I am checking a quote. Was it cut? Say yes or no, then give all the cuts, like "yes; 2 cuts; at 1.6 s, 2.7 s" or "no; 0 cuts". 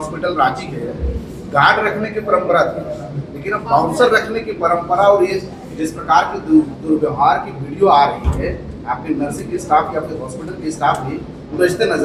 no; 0 cuts